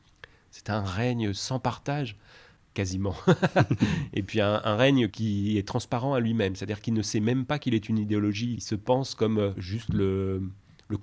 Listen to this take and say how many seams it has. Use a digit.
3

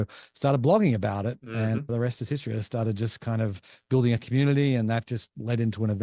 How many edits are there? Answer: 1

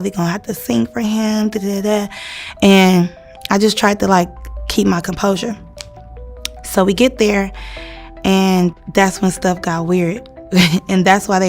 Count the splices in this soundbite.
1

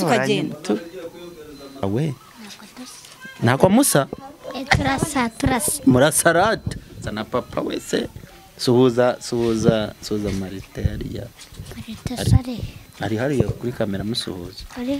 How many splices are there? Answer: 1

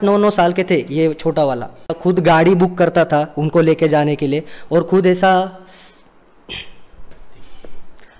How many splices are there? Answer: 1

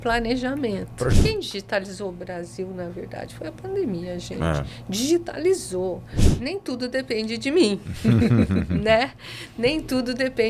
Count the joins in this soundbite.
2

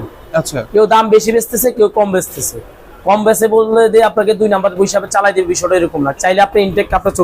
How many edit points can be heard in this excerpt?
1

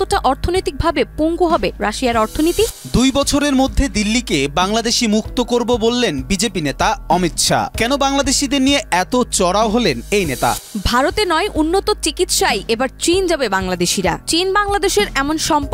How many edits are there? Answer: 2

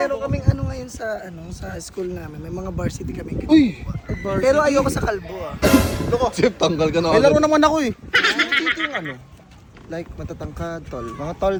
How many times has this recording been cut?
0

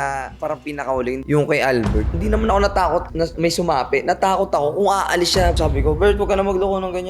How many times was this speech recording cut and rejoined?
3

